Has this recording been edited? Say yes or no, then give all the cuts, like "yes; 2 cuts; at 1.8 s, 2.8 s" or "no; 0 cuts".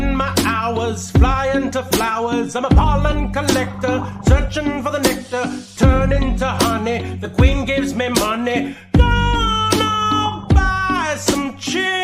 no; 0 cuts